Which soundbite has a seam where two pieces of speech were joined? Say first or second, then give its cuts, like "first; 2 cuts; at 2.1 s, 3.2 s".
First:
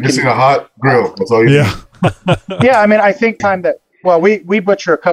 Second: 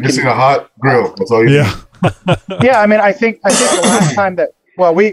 first; 1 cut; at 3.4 s